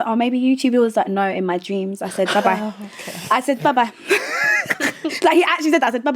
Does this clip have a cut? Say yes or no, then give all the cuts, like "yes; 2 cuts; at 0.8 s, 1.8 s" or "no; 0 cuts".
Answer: no; 0 cuts